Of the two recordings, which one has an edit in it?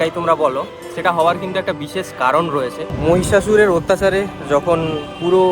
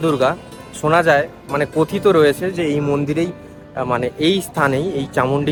first; 1 cut; at 2.8 s

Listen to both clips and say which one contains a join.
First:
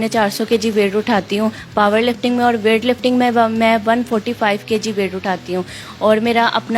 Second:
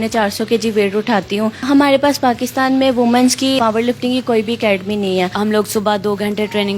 second; 3 cuts; at 1.6 s, 3.6 s, 5.3 s

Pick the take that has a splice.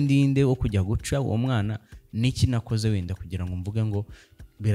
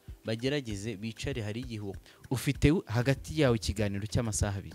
second; 1 cut; at 2.0 s

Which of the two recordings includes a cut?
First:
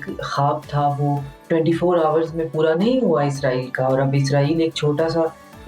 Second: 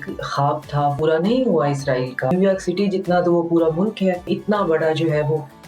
second; 3 cuts; at 1.0 s, 2.3 s, 4.3 s

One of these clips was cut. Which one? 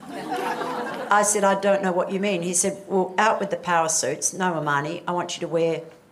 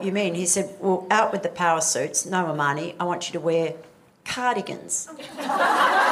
first; 1 cut; at 0.9 s

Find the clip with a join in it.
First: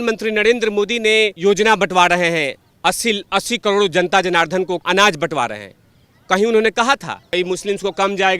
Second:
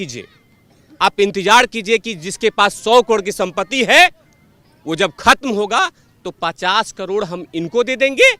first; 3 cuts; at 1.4 s, 4.8 s, 7.2 s

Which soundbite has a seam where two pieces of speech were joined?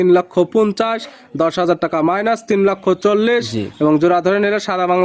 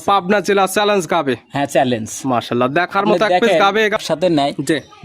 second; 1 cut; at 4.0 s

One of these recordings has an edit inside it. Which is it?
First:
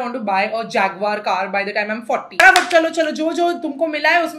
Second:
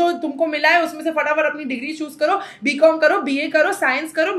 first; 1 cut; at 2.4 s

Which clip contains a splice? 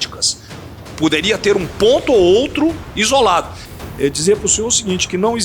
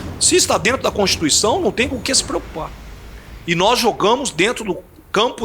first; 1 cut; at 3.6 s

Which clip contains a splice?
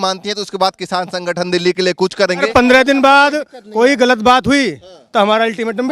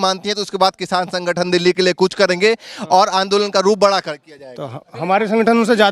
first; 1 cut; at 2.5 s

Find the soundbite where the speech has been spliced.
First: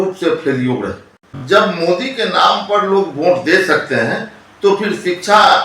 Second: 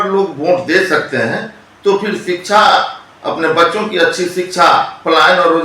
first; 1 cut; at 1.4 s

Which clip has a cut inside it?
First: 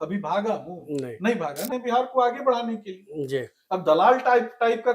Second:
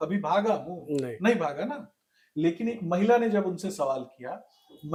first; 1 cut; at 1.7 s

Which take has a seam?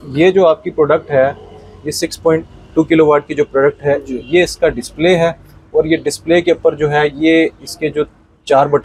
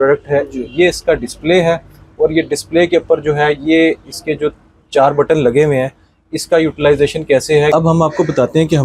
second; 1 cut; at 7.7 s

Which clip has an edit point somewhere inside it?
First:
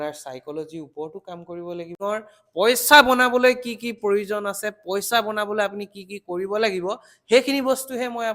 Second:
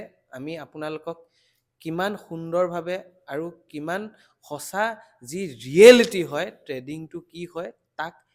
first; 1 cut; at 2.0 s

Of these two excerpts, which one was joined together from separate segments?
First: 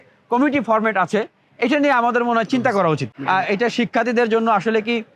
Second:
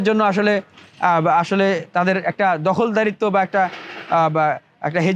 first; 1 cut; at 3.1 s

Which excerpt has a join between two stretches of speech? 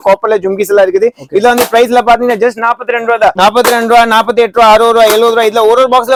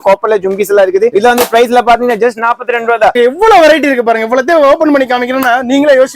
second; 2 cuts; at 1.1 s, 3.1 s

